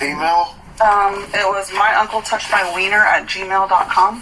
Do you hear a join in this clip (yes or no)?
no